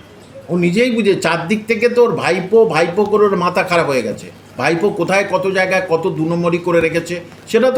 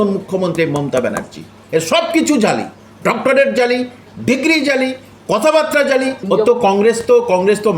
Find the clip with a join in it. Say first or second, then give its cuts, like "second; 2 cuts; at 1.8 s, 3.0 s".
second; 1 cut; at 6.2 s